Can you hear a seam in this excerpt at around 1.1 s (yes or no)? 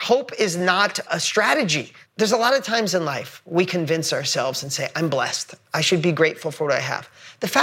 yes